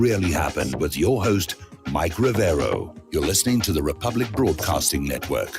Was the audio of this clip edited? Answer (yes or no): yes